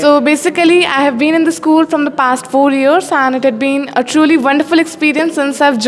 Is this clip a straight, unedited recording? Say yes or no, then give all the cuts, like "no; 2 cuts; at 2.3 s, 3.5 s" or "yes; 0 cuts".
yes; 0 cuts